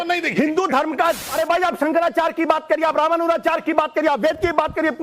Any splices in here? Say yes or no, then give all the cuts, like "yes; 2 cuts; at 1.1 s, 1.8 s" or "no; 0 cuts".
yes; 1 cut; at 1.2 s